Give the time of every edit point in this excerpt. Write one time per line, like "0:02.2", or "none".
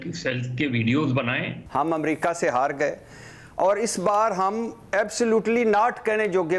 0:01.5